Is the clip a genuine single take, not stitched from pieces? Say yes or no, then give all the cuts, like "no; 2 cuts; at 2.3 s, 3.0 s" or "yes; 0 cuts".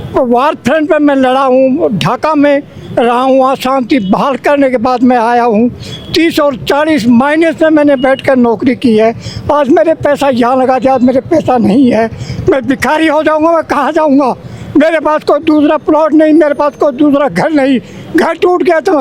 yes; 0 cuts